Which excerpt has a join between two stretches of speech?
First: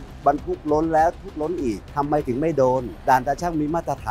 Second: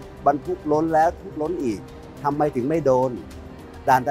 first; 2 cuts; at 1.8 s, 2.9 s

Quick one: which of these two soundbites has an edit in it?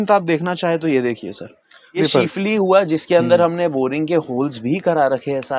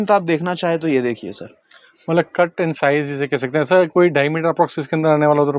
first; 1 cut; at 2.0 s

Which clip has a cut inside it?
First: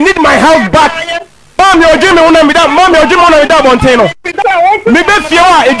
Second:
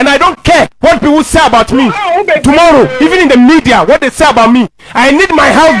first; 2 cuts; at 1.6 s, 4.3 s

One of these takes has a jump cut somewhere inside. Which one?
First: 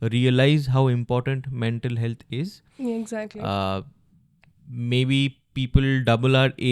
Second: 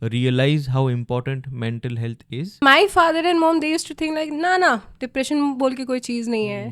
second; 1 cut; at 2.6 s

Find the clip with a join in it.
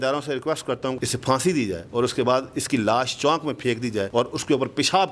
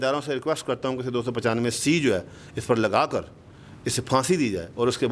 first; 2 cuts; at 1.0 s, 4.1 s

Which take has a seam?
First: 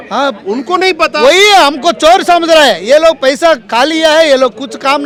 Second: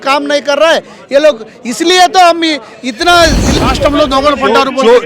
second; 1 cut; at 3.4 s

